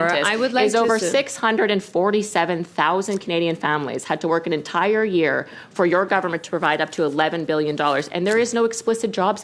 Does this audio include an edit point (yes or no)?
no